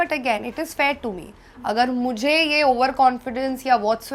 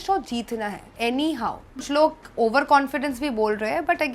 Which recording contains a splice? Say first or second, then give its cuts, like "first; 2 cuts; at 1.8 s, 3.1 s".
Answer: second; 1 cut; at 1.7 s